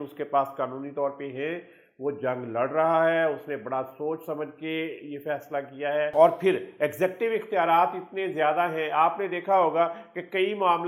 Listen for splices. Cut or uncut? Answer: uncut